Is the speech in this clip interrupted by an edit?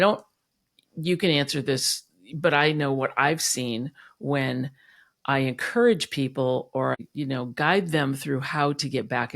yes; 1 cut; at 7.0 s

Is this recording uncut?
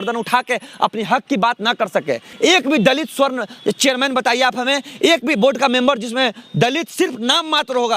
no; 1 cut; at 2.3 s

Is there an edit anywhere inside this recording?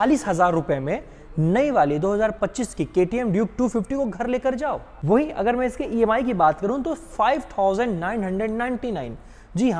no; 0 cuts

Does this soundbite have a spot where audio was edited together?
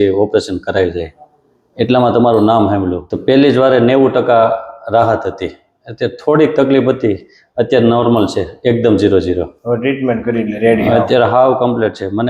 yes; 1 cut; at 3.1 s

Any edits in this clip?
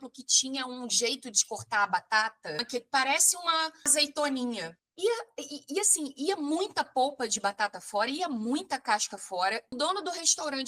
yes; 3 cuts; at 2.6 s, 3.9 s, 9.7 s

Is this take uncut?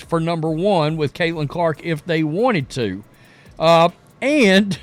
yes; 0 cuts

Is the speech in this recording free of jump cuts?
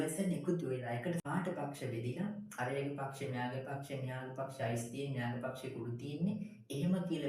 no; 1 cut; at 1.2 s

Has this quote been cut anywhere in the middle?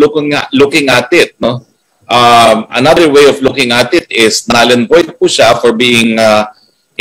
no; 0 cuts

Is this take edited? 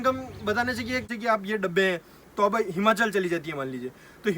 yes; 1 cut; at 1.1 s

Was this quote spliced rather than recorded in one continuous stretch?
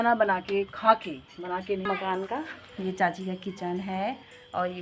yes; 1 cut; at 1.8 s

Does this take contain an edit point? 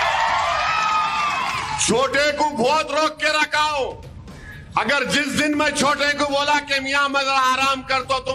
yes; 1 cut; at 3.2 s

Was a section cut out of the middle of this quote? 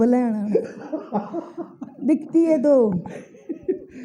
no; 0 cuts

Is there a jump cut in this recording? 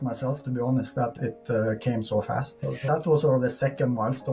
yes; 2 cuts; at 1.1 s, 2.8 s

